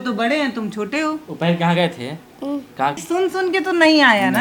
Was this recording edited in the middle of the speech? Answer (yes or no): yes